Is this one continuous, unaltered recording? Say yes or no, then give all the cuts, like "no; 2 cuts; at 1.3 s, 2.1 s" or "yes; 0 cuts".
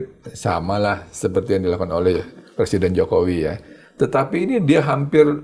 yes; 0 cuts